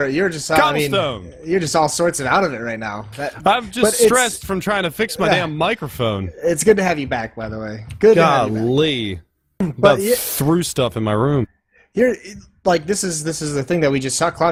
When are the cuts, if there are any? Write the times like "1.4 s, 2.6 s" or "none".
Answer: none